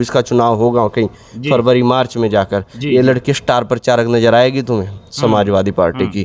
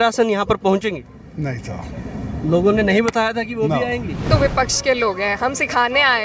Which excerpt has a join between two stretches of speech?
second; 1 cut; at 4.3 s

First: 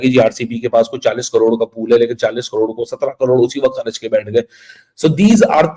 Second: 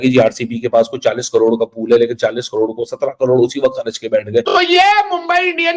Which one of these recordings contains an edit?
second; 1 cut; at 4.6 s

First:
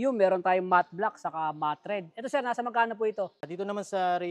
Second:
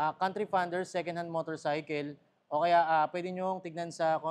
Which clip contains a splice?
first; 1 cut; at 3.4 s

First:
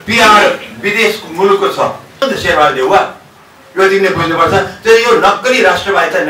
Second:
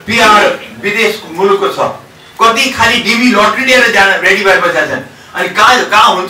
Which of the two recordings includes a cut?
first; 1 cut; at 2.2 s

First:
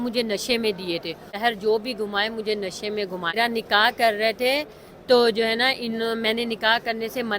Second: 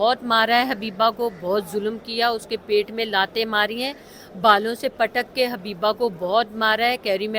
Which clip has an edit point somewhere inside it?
first; 2 cuts; at 1.4 s, 3.4 s

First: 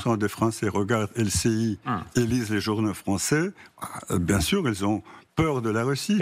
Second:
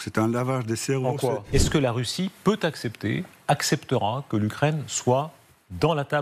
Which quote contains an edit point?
second; 1 cut; at 1.4 s

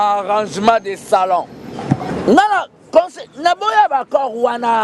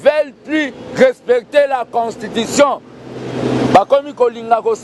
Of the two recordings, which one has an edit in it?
first; 1 cut; at 2.1 s

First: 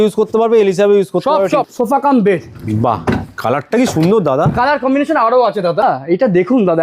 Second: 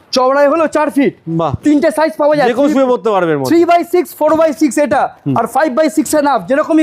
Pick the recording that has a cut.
first; 2 cuts; at 1.7 s, 5.8 s

